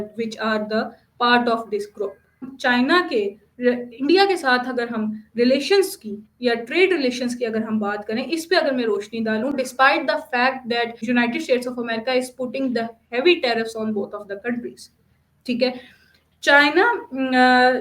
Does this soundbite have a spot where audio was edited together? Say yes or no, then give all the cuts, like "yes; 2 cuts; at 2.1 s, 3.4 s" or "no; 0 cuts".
yes; 1 cut; at 2.5 s